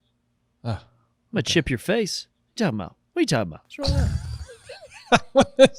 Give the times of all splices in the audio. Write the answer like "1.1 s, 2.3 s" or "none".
3.6 s